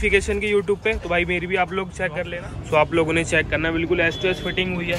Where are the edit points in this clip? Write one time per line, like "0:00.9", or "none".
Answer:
0:02.3